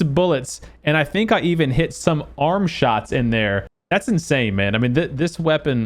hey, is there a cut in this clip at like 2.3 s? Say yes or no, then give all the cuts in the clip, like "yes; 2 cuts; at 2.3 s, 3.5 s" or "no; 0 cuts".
no; 1 cut; at 3.7 s